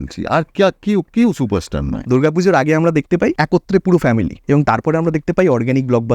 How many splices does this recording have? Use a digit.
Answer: 3